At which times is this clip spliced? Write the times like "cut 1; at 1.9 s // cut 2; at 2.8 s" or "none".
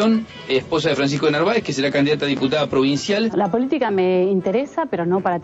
cut 1; at 3.3 s